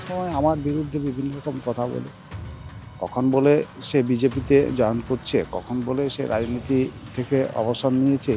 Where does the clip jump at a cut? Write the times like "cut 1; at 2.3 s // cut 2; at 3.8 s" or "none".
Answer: none

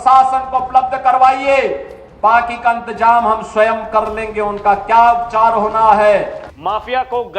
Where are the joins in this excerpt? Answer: cut 1; at 6.4 s

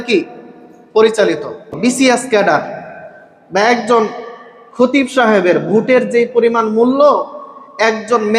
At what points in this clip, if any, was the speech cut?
cut 1; at 1.8 s

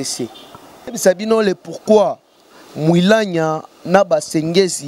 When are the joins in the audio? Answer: cut 1; at 1.0 s

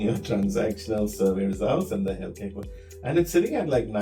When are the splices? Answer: none

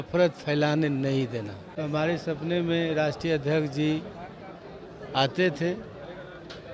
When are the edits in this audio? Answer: cut 1; at 1.7 s

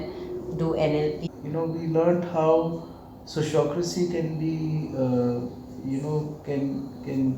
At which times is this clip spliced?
cut 1; at 1.2 s

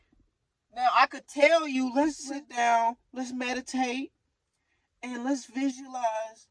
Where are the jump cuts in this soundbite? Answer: cut 1; at 2.2 s

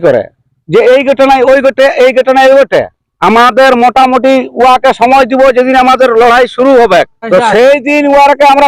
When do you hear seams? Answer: cut 1; at 7.2 s

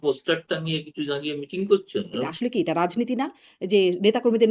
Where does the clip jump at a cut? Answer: cut 1; at 2.2 s

